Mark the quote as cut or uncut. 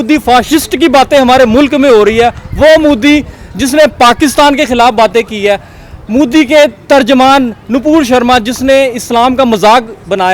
uncut